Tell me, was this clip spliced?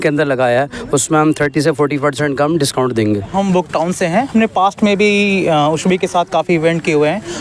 yes; 1 cut; at 3.3 s

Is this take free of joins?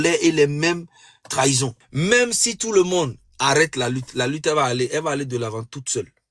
no; 1 cut; at 1.8 s

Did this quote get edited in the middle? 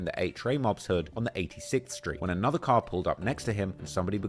no; 0 cuts

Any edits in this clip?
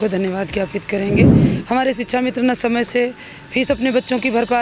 no; 0 cuts

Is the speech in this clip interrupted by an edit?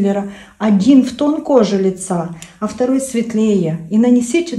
no; 0 cuts

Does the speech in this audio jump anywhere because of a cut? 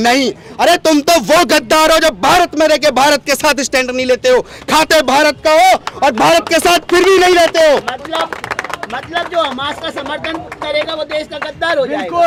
no; 0 cuts

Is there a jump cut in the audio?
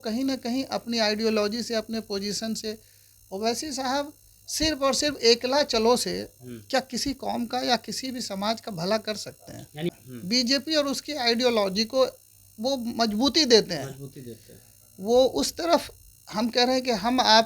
yes; 1 cut; at 9.9 s

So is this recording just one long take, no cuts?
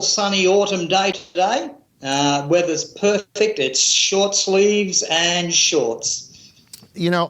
yes; 0 cuts

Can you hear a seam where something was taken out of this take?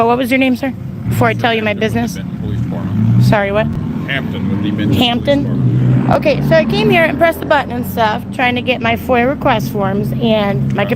no; 0 cuts

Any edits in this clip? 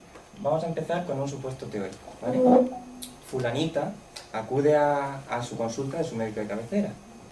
no; 0 cuts

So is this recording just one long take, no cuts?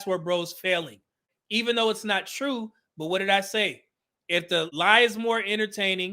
no; 1 cut; at 4.7 s

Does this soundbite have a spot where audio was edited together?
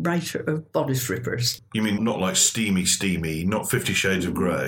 yes; 1 cut; at 1.9 s

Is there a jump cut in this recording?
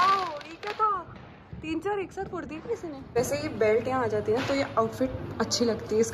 yes; 1 cut; at 3.1 s

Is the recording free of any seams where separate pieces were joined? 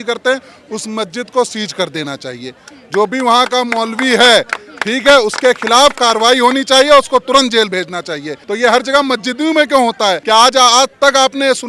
no; 2 cuts; at 8.3 s, 10.2 s

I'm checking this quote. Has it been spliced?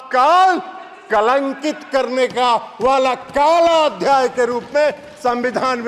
no; 0 cuts

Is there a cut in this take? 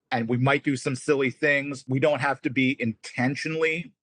yes; 1 cut; at 1.8 s

